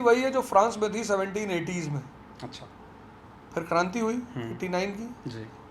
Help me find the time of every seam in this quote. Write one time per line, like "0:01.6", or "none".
none